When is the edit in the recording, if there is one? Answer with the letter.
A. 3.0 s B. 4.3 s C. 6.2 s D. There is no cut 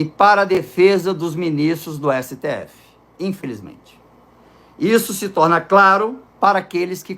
C